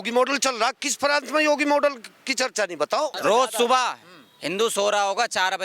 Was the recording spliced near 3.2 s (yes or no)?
yes